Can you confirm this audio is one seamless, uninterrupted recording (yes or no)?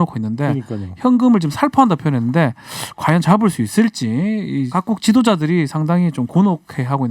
no